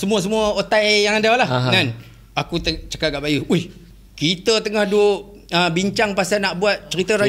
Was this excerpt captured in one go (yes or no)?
yes